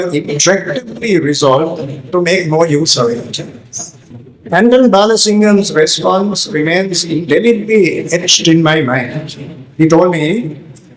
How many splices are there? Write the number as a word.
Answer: zero